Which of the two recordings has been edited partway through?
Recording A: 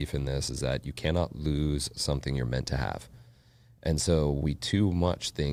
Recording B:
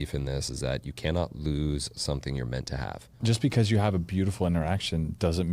B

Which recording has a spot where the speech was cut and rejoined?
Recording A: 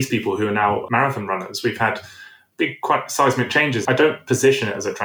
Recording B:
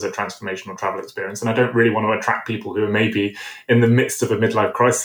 A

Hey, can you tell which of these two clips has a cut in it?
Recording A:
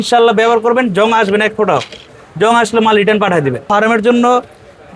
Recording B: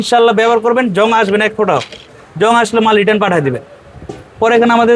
A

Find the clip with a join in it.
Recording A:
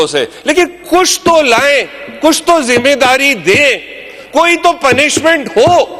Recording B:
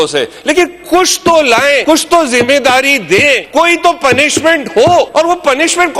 B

